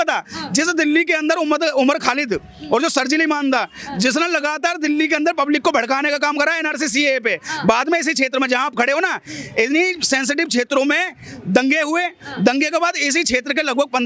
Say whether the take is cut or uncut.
uncut